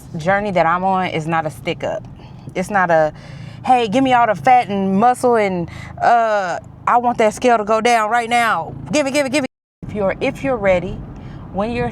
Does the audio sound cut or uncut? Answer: cut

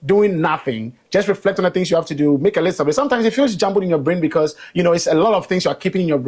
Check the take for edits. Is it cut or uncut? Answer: uncut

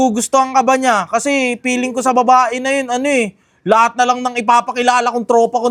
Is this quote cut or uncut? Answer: uncut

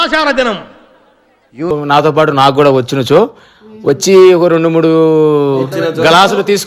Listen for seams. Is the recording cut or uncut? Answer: cut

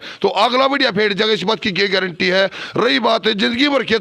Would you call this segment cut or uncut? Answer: uncut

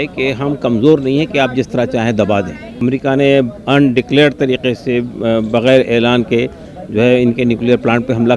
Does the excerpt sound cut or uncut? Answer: cut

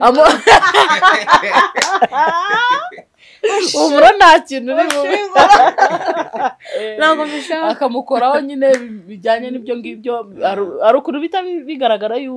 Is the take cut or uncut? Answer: uncut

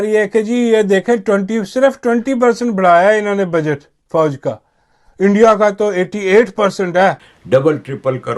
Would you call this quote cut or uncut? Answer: cut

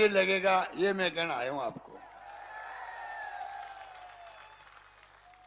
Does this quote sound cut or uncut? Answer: uncut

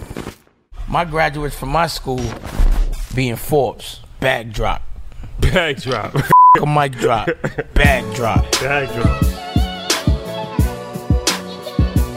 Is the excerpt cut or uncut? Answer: uncut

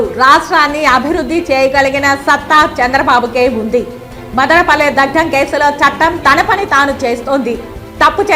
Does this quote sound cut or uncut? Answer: uncut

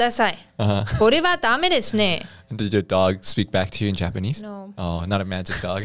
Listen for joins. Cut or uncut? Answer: uncut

